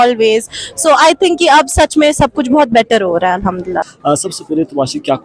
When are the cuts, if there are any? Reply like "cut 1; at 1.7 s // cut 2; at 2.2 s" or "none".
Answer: none